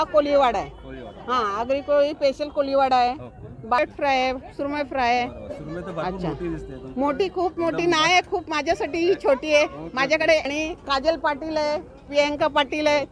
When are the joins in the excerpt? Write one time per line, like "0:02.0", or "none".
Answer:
0:03.8
0:10.4